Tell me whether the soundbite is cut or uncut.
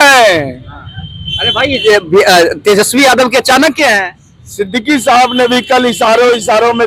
uncut